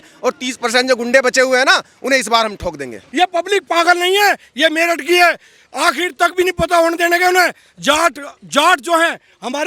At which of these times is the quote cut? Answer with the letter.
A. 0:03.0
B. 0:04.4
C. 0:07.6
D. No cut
A